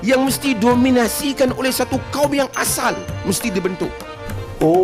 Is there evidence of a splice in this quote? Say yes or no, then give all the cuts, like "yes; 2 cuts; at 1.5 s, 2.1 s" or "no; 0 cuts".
no; 0 cuts